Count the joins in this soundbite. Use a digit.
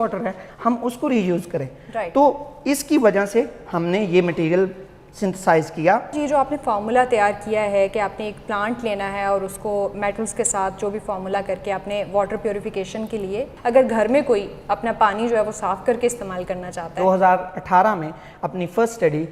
3